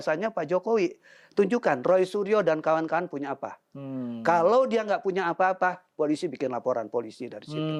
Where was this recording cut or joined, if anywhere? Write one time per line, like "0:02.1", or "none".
none